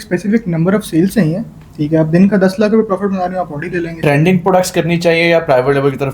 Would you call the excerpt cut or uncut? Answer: cut